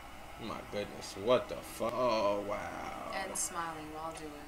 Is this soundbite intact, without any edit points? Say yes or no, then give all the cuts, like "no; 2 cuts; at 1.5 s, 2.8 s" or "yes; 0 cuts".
no; 1 cut; at 1.9 s